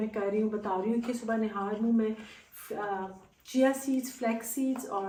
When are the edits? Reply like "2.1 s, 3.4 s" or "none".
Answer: none